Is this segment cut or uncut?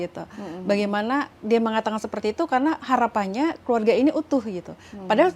uncut